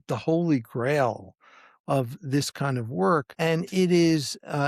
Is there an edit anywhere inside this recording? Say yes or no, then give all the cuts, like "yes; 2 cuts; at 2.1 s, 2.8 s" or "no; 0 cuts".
yes; 1 cut; at 3.3 s